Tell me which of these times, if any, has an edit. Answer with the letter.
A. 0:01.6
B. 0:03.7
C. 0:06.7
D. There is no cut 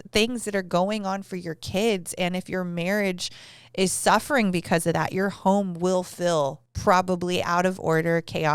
C